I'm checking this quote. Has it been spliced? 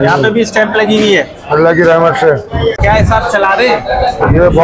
yes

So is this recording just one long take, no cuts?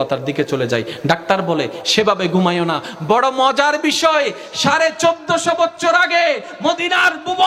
yes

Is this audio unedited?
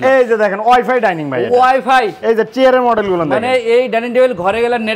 yes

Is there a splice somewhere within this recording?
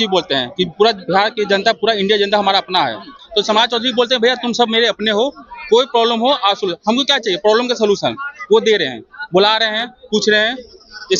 no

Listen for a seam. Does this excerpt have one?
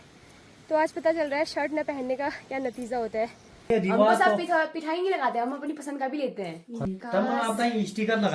yes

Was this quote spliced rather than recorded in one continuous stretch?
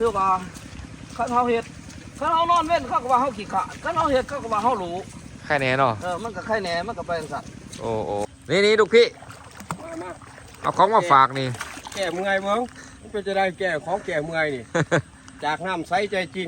yes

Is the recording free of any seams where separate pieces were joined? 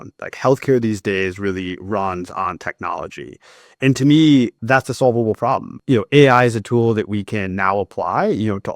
no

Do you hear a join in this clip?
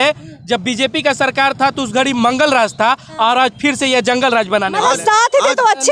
no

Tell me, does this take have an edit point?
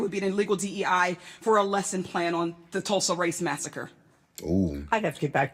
no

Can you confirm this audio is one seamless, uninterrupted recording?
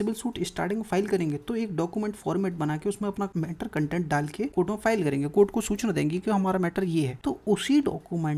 no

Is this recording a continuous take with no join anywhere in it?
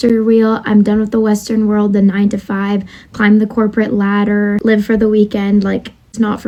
yes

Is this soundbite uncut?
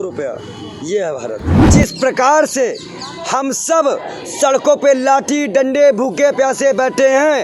no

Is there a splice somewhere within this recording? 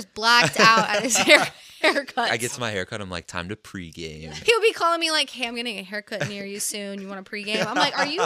yes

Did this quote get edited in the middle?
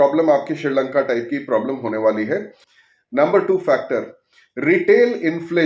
no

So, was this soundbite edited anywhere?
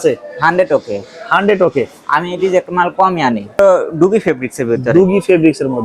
yes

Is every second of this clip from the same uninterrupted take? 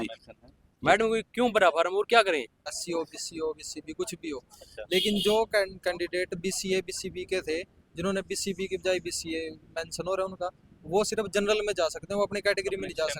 no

